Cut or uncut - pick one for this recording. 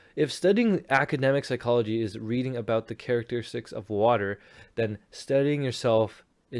uncut